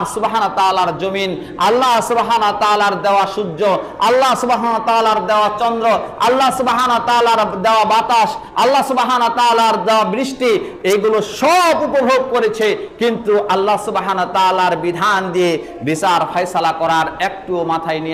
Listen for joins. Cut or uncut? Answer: uncut